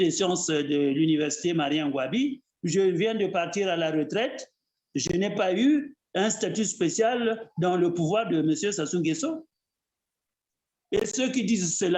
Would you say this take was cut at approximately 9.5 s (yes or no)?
no